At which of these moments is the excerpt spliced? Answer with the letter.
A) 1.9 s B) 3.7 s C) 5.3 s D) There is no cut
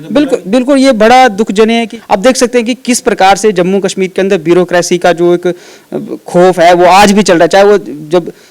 A